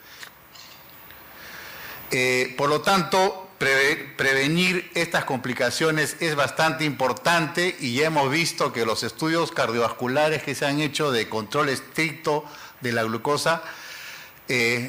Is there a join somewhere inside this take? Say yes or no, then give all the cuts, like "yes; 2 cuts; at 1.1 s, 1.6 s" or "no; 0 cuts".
yes; 1 cut; at 9.0 s